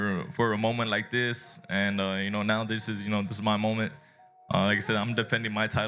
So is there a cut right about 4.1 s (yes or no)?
no